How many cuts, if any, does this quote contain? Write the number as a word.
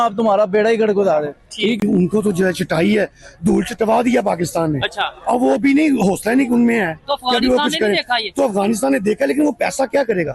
one